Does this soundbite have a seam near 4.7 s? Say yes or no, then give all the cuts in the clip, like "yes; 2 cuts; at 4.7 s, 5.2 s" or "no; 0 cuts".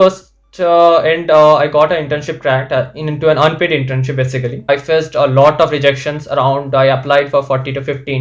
yes; 1 cut; at 4.7 s